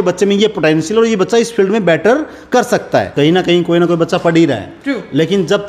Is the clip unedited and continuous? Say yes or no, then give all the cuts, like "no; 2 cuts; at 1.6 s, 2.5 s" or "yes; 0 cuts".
no; 1 cut; at 3.1 s